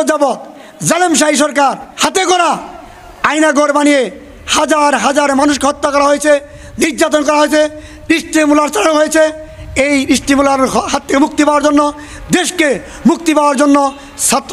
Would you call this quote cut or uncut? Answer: cut